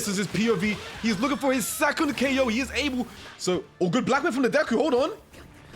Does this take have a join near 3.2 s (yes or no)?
yes